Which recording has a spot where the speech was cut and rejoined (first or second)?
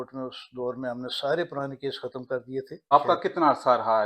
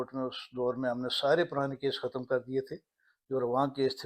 first